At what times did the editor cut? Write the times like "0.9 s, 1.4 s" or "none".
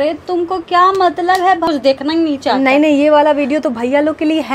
1.6 s